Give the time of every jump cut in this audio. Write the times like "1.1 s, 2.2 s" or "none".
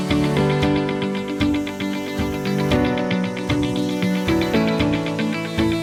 none